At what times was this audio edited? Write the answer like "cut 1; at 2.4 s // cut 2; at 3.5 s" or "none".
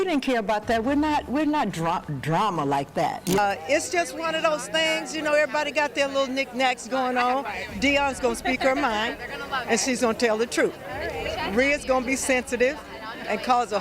cut 1; at 3.2 s